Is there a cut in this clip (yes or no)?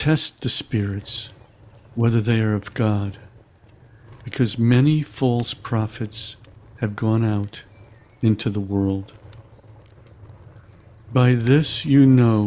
no